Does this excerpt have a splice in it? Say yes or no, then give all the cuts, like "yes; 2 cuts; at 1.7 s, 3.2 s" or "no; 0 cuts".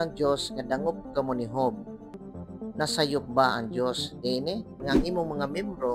yes; 2 cuts; at 2.1 s, 4.8 s